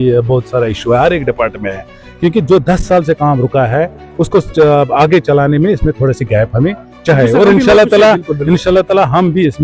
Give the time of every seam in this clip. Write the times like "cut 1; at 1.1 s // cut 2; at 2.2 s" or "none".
none